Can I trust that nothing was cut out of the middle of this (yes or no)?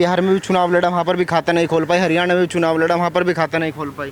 yes